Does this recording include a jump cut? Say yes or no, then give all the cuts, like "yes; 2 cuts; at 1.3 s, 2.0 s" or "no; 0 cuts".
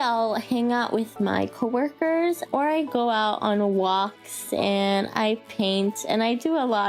yes; 1 cut; at 2.5 s